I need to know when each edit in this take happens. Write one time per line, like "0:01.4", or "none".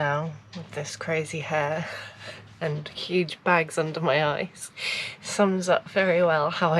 none